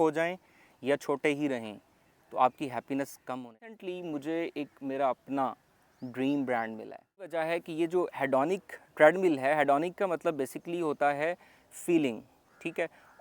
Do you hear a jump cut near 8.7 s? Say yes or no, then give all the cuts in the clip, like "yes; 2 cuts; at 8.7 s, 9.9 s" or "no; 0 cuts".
no; 2 cuts; at 3.8 s, 7.3 s